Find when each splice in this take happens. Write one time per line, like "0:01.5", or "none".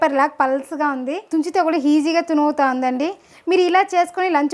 0:01.2